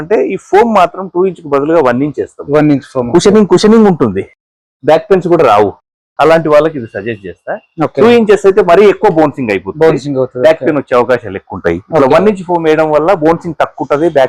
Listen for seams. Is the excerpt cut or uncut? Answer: uncut